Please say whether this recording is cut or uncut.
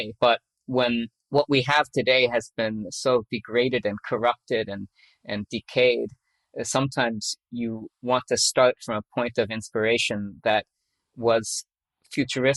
uncut